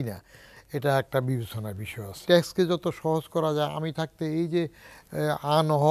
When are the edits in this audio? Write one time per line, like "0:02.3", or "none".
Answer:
0:02.2